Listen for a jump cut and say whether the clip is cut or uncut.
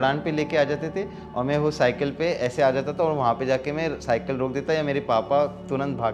uncut